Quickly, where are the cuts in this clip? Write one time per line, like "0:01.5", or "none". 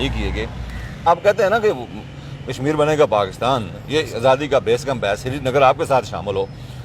0:01.1